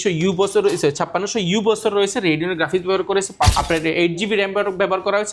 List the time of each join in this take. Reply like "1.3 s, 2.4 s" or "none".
3.5 s